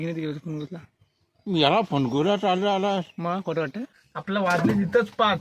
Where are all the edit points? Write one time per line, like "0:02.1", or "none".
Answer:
0:03.9